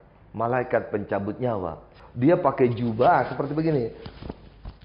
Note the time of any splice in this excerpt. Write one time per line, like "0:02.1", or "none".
0:01.9